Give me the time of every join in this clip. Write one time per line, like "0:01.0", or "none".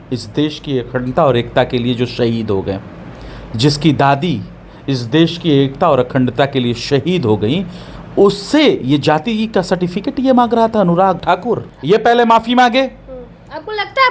0:11.2